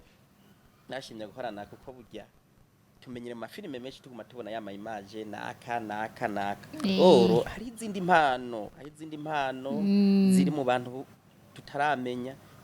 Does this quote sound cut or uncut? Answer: uncut